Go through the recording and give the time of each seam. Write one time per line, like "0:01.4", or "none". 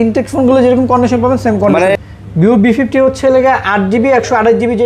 0:02.0

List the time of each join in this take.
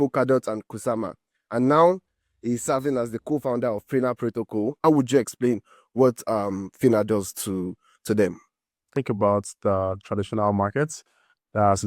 0:04.8
0:08.8

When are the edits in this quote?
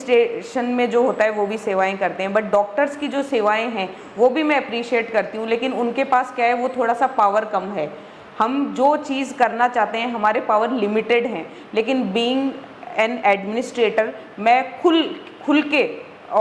none

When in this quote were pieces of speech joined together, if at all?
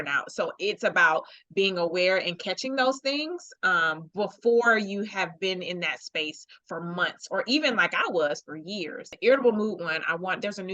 0:09.1

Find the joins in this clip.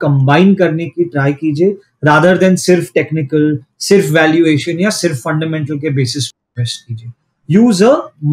none

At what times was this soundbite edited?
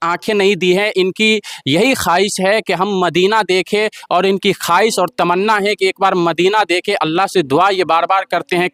none

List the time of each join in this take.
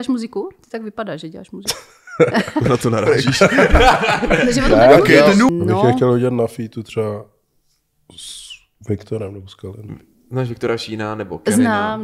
0:05.5

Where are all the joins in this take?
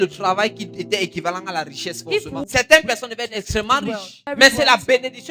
0:02.4
0:04.3

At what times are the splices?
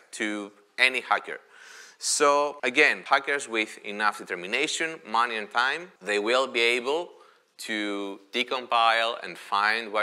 0:03.0
0:05.9

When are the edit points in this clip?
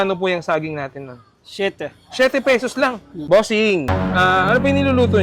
0:03.1

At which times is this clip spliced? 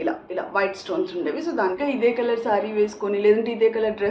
0:01.8

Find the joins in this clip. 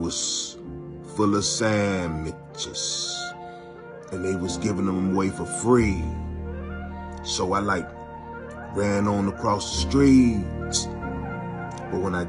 none

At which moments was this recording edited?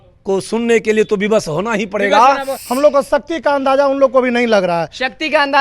0:02.5

